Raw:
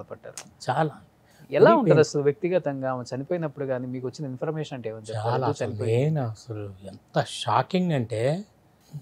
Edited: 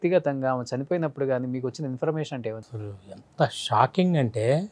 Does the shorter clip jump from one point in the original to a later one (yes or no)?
yes